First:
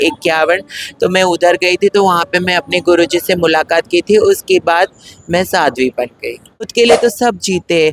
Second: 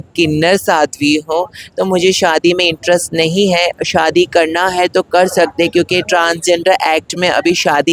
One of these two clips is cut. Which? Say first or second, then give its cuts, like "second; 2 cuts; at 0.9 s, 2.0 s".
first; 1 cut; at 6.7 s